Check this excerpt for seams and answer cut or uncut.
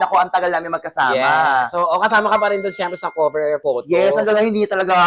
uncut